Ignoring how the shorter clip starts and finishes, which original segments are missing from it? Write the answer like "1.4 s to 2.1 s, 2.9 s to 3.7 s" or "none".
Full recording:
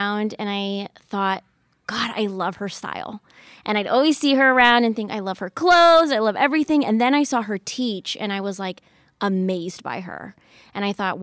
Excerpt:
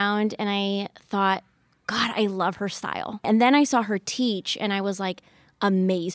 3.3 s to 6.9 s